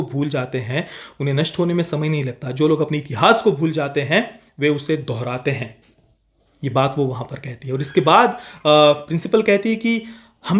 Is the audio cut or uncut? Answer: uncut